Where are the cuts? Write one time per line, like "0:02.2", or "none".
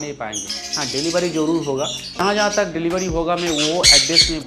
0:02.1